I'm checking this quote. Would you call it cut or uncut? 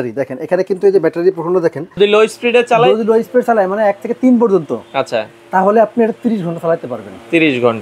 cut